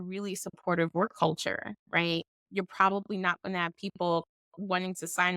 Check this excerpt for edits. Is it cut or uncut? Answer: cut